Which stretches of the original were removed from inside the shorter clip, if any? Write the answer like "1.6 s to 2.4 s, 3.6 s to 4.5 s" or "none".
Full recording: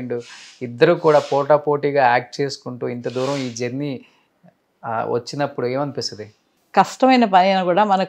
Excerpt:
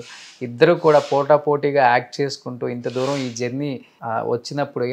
4.1 s to 4.7 s